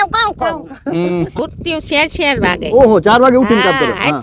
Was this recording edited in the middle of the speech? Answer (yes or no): yes